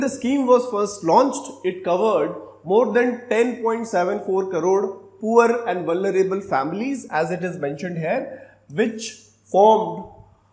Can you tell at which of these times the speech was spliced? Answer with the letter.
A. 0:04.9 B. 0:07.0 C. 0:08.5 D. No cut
D